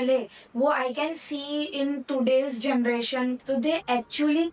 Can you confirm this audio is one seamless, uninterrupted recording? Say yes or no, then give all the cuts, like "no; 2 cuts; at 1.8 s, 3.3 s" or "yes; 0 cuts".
no; 1 cut; at 3.4 s